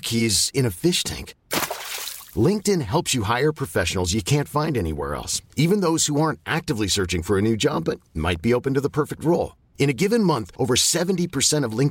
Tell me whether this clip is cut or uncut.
uncut